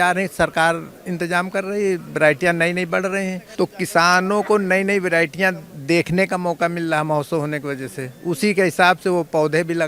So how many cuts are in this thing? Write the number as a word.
one